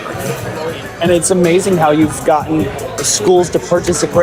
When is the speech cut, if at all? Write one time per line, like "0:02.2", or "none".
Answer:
none